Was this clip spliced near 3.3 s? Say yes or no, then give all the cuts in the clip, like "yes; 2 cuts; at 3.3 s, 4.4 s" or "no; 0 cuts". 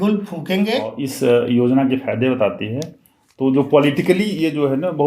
no; 1 cut; at 1.0 s